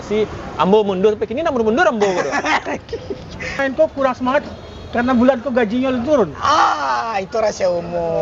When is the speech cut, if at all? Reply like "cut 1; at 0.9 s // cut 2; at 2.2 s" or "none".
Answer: cut 1; at 3.6 s